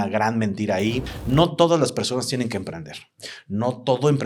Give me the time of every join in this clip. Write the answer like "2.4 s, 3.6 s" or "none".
1.1 s